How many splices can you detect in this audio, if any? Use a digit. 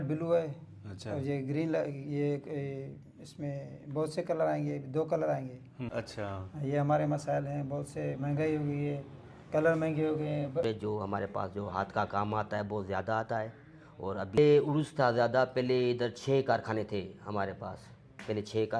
3